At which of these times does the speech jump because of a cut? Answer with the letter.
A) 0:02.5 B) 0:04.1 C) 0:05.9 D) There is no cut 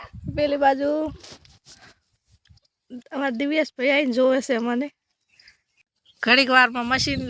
C